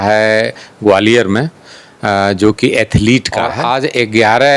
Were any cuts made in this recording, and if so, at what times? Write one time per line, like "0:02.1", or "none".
0:03.6